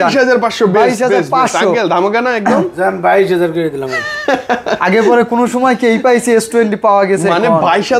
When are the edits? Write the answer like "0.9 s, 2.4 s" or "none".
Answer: none